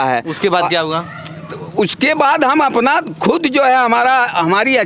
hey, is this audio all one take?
yes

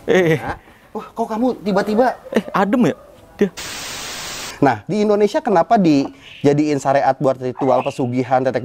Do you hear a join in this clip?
yes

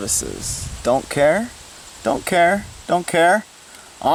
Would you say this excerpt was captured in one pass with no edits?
yes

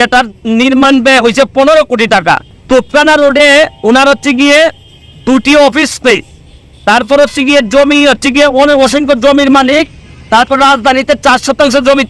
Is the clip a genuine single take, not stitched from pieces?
yes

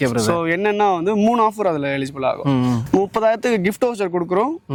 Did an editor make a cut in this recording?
no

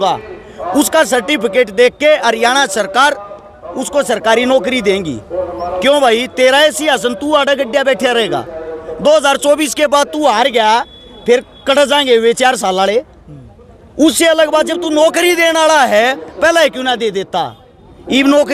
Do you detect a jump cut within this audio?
no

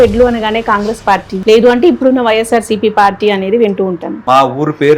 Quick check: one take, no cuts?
no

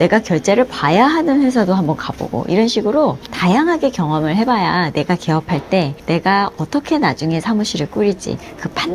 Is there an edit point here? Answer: no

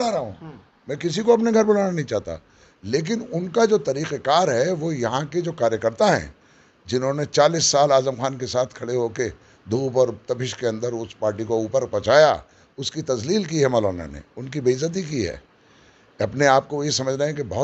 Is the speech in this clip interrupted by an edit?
no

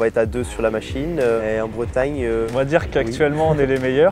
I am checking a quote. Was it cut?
yes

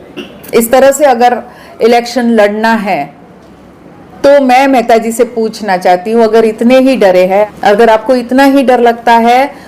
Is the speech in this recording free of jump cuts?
no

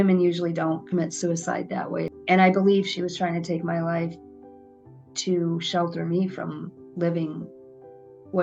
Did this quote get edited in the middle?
yes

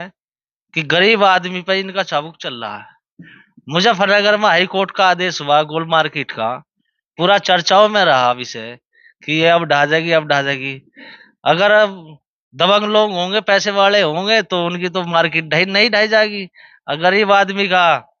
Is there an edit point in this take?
no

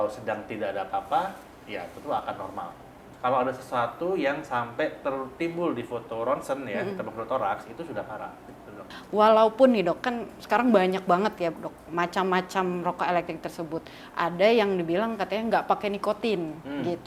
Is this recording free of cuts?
no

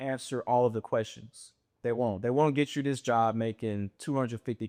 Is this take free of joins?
yes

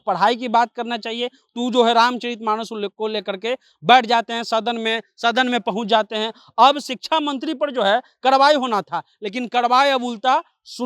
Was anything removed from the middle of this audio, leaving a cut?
no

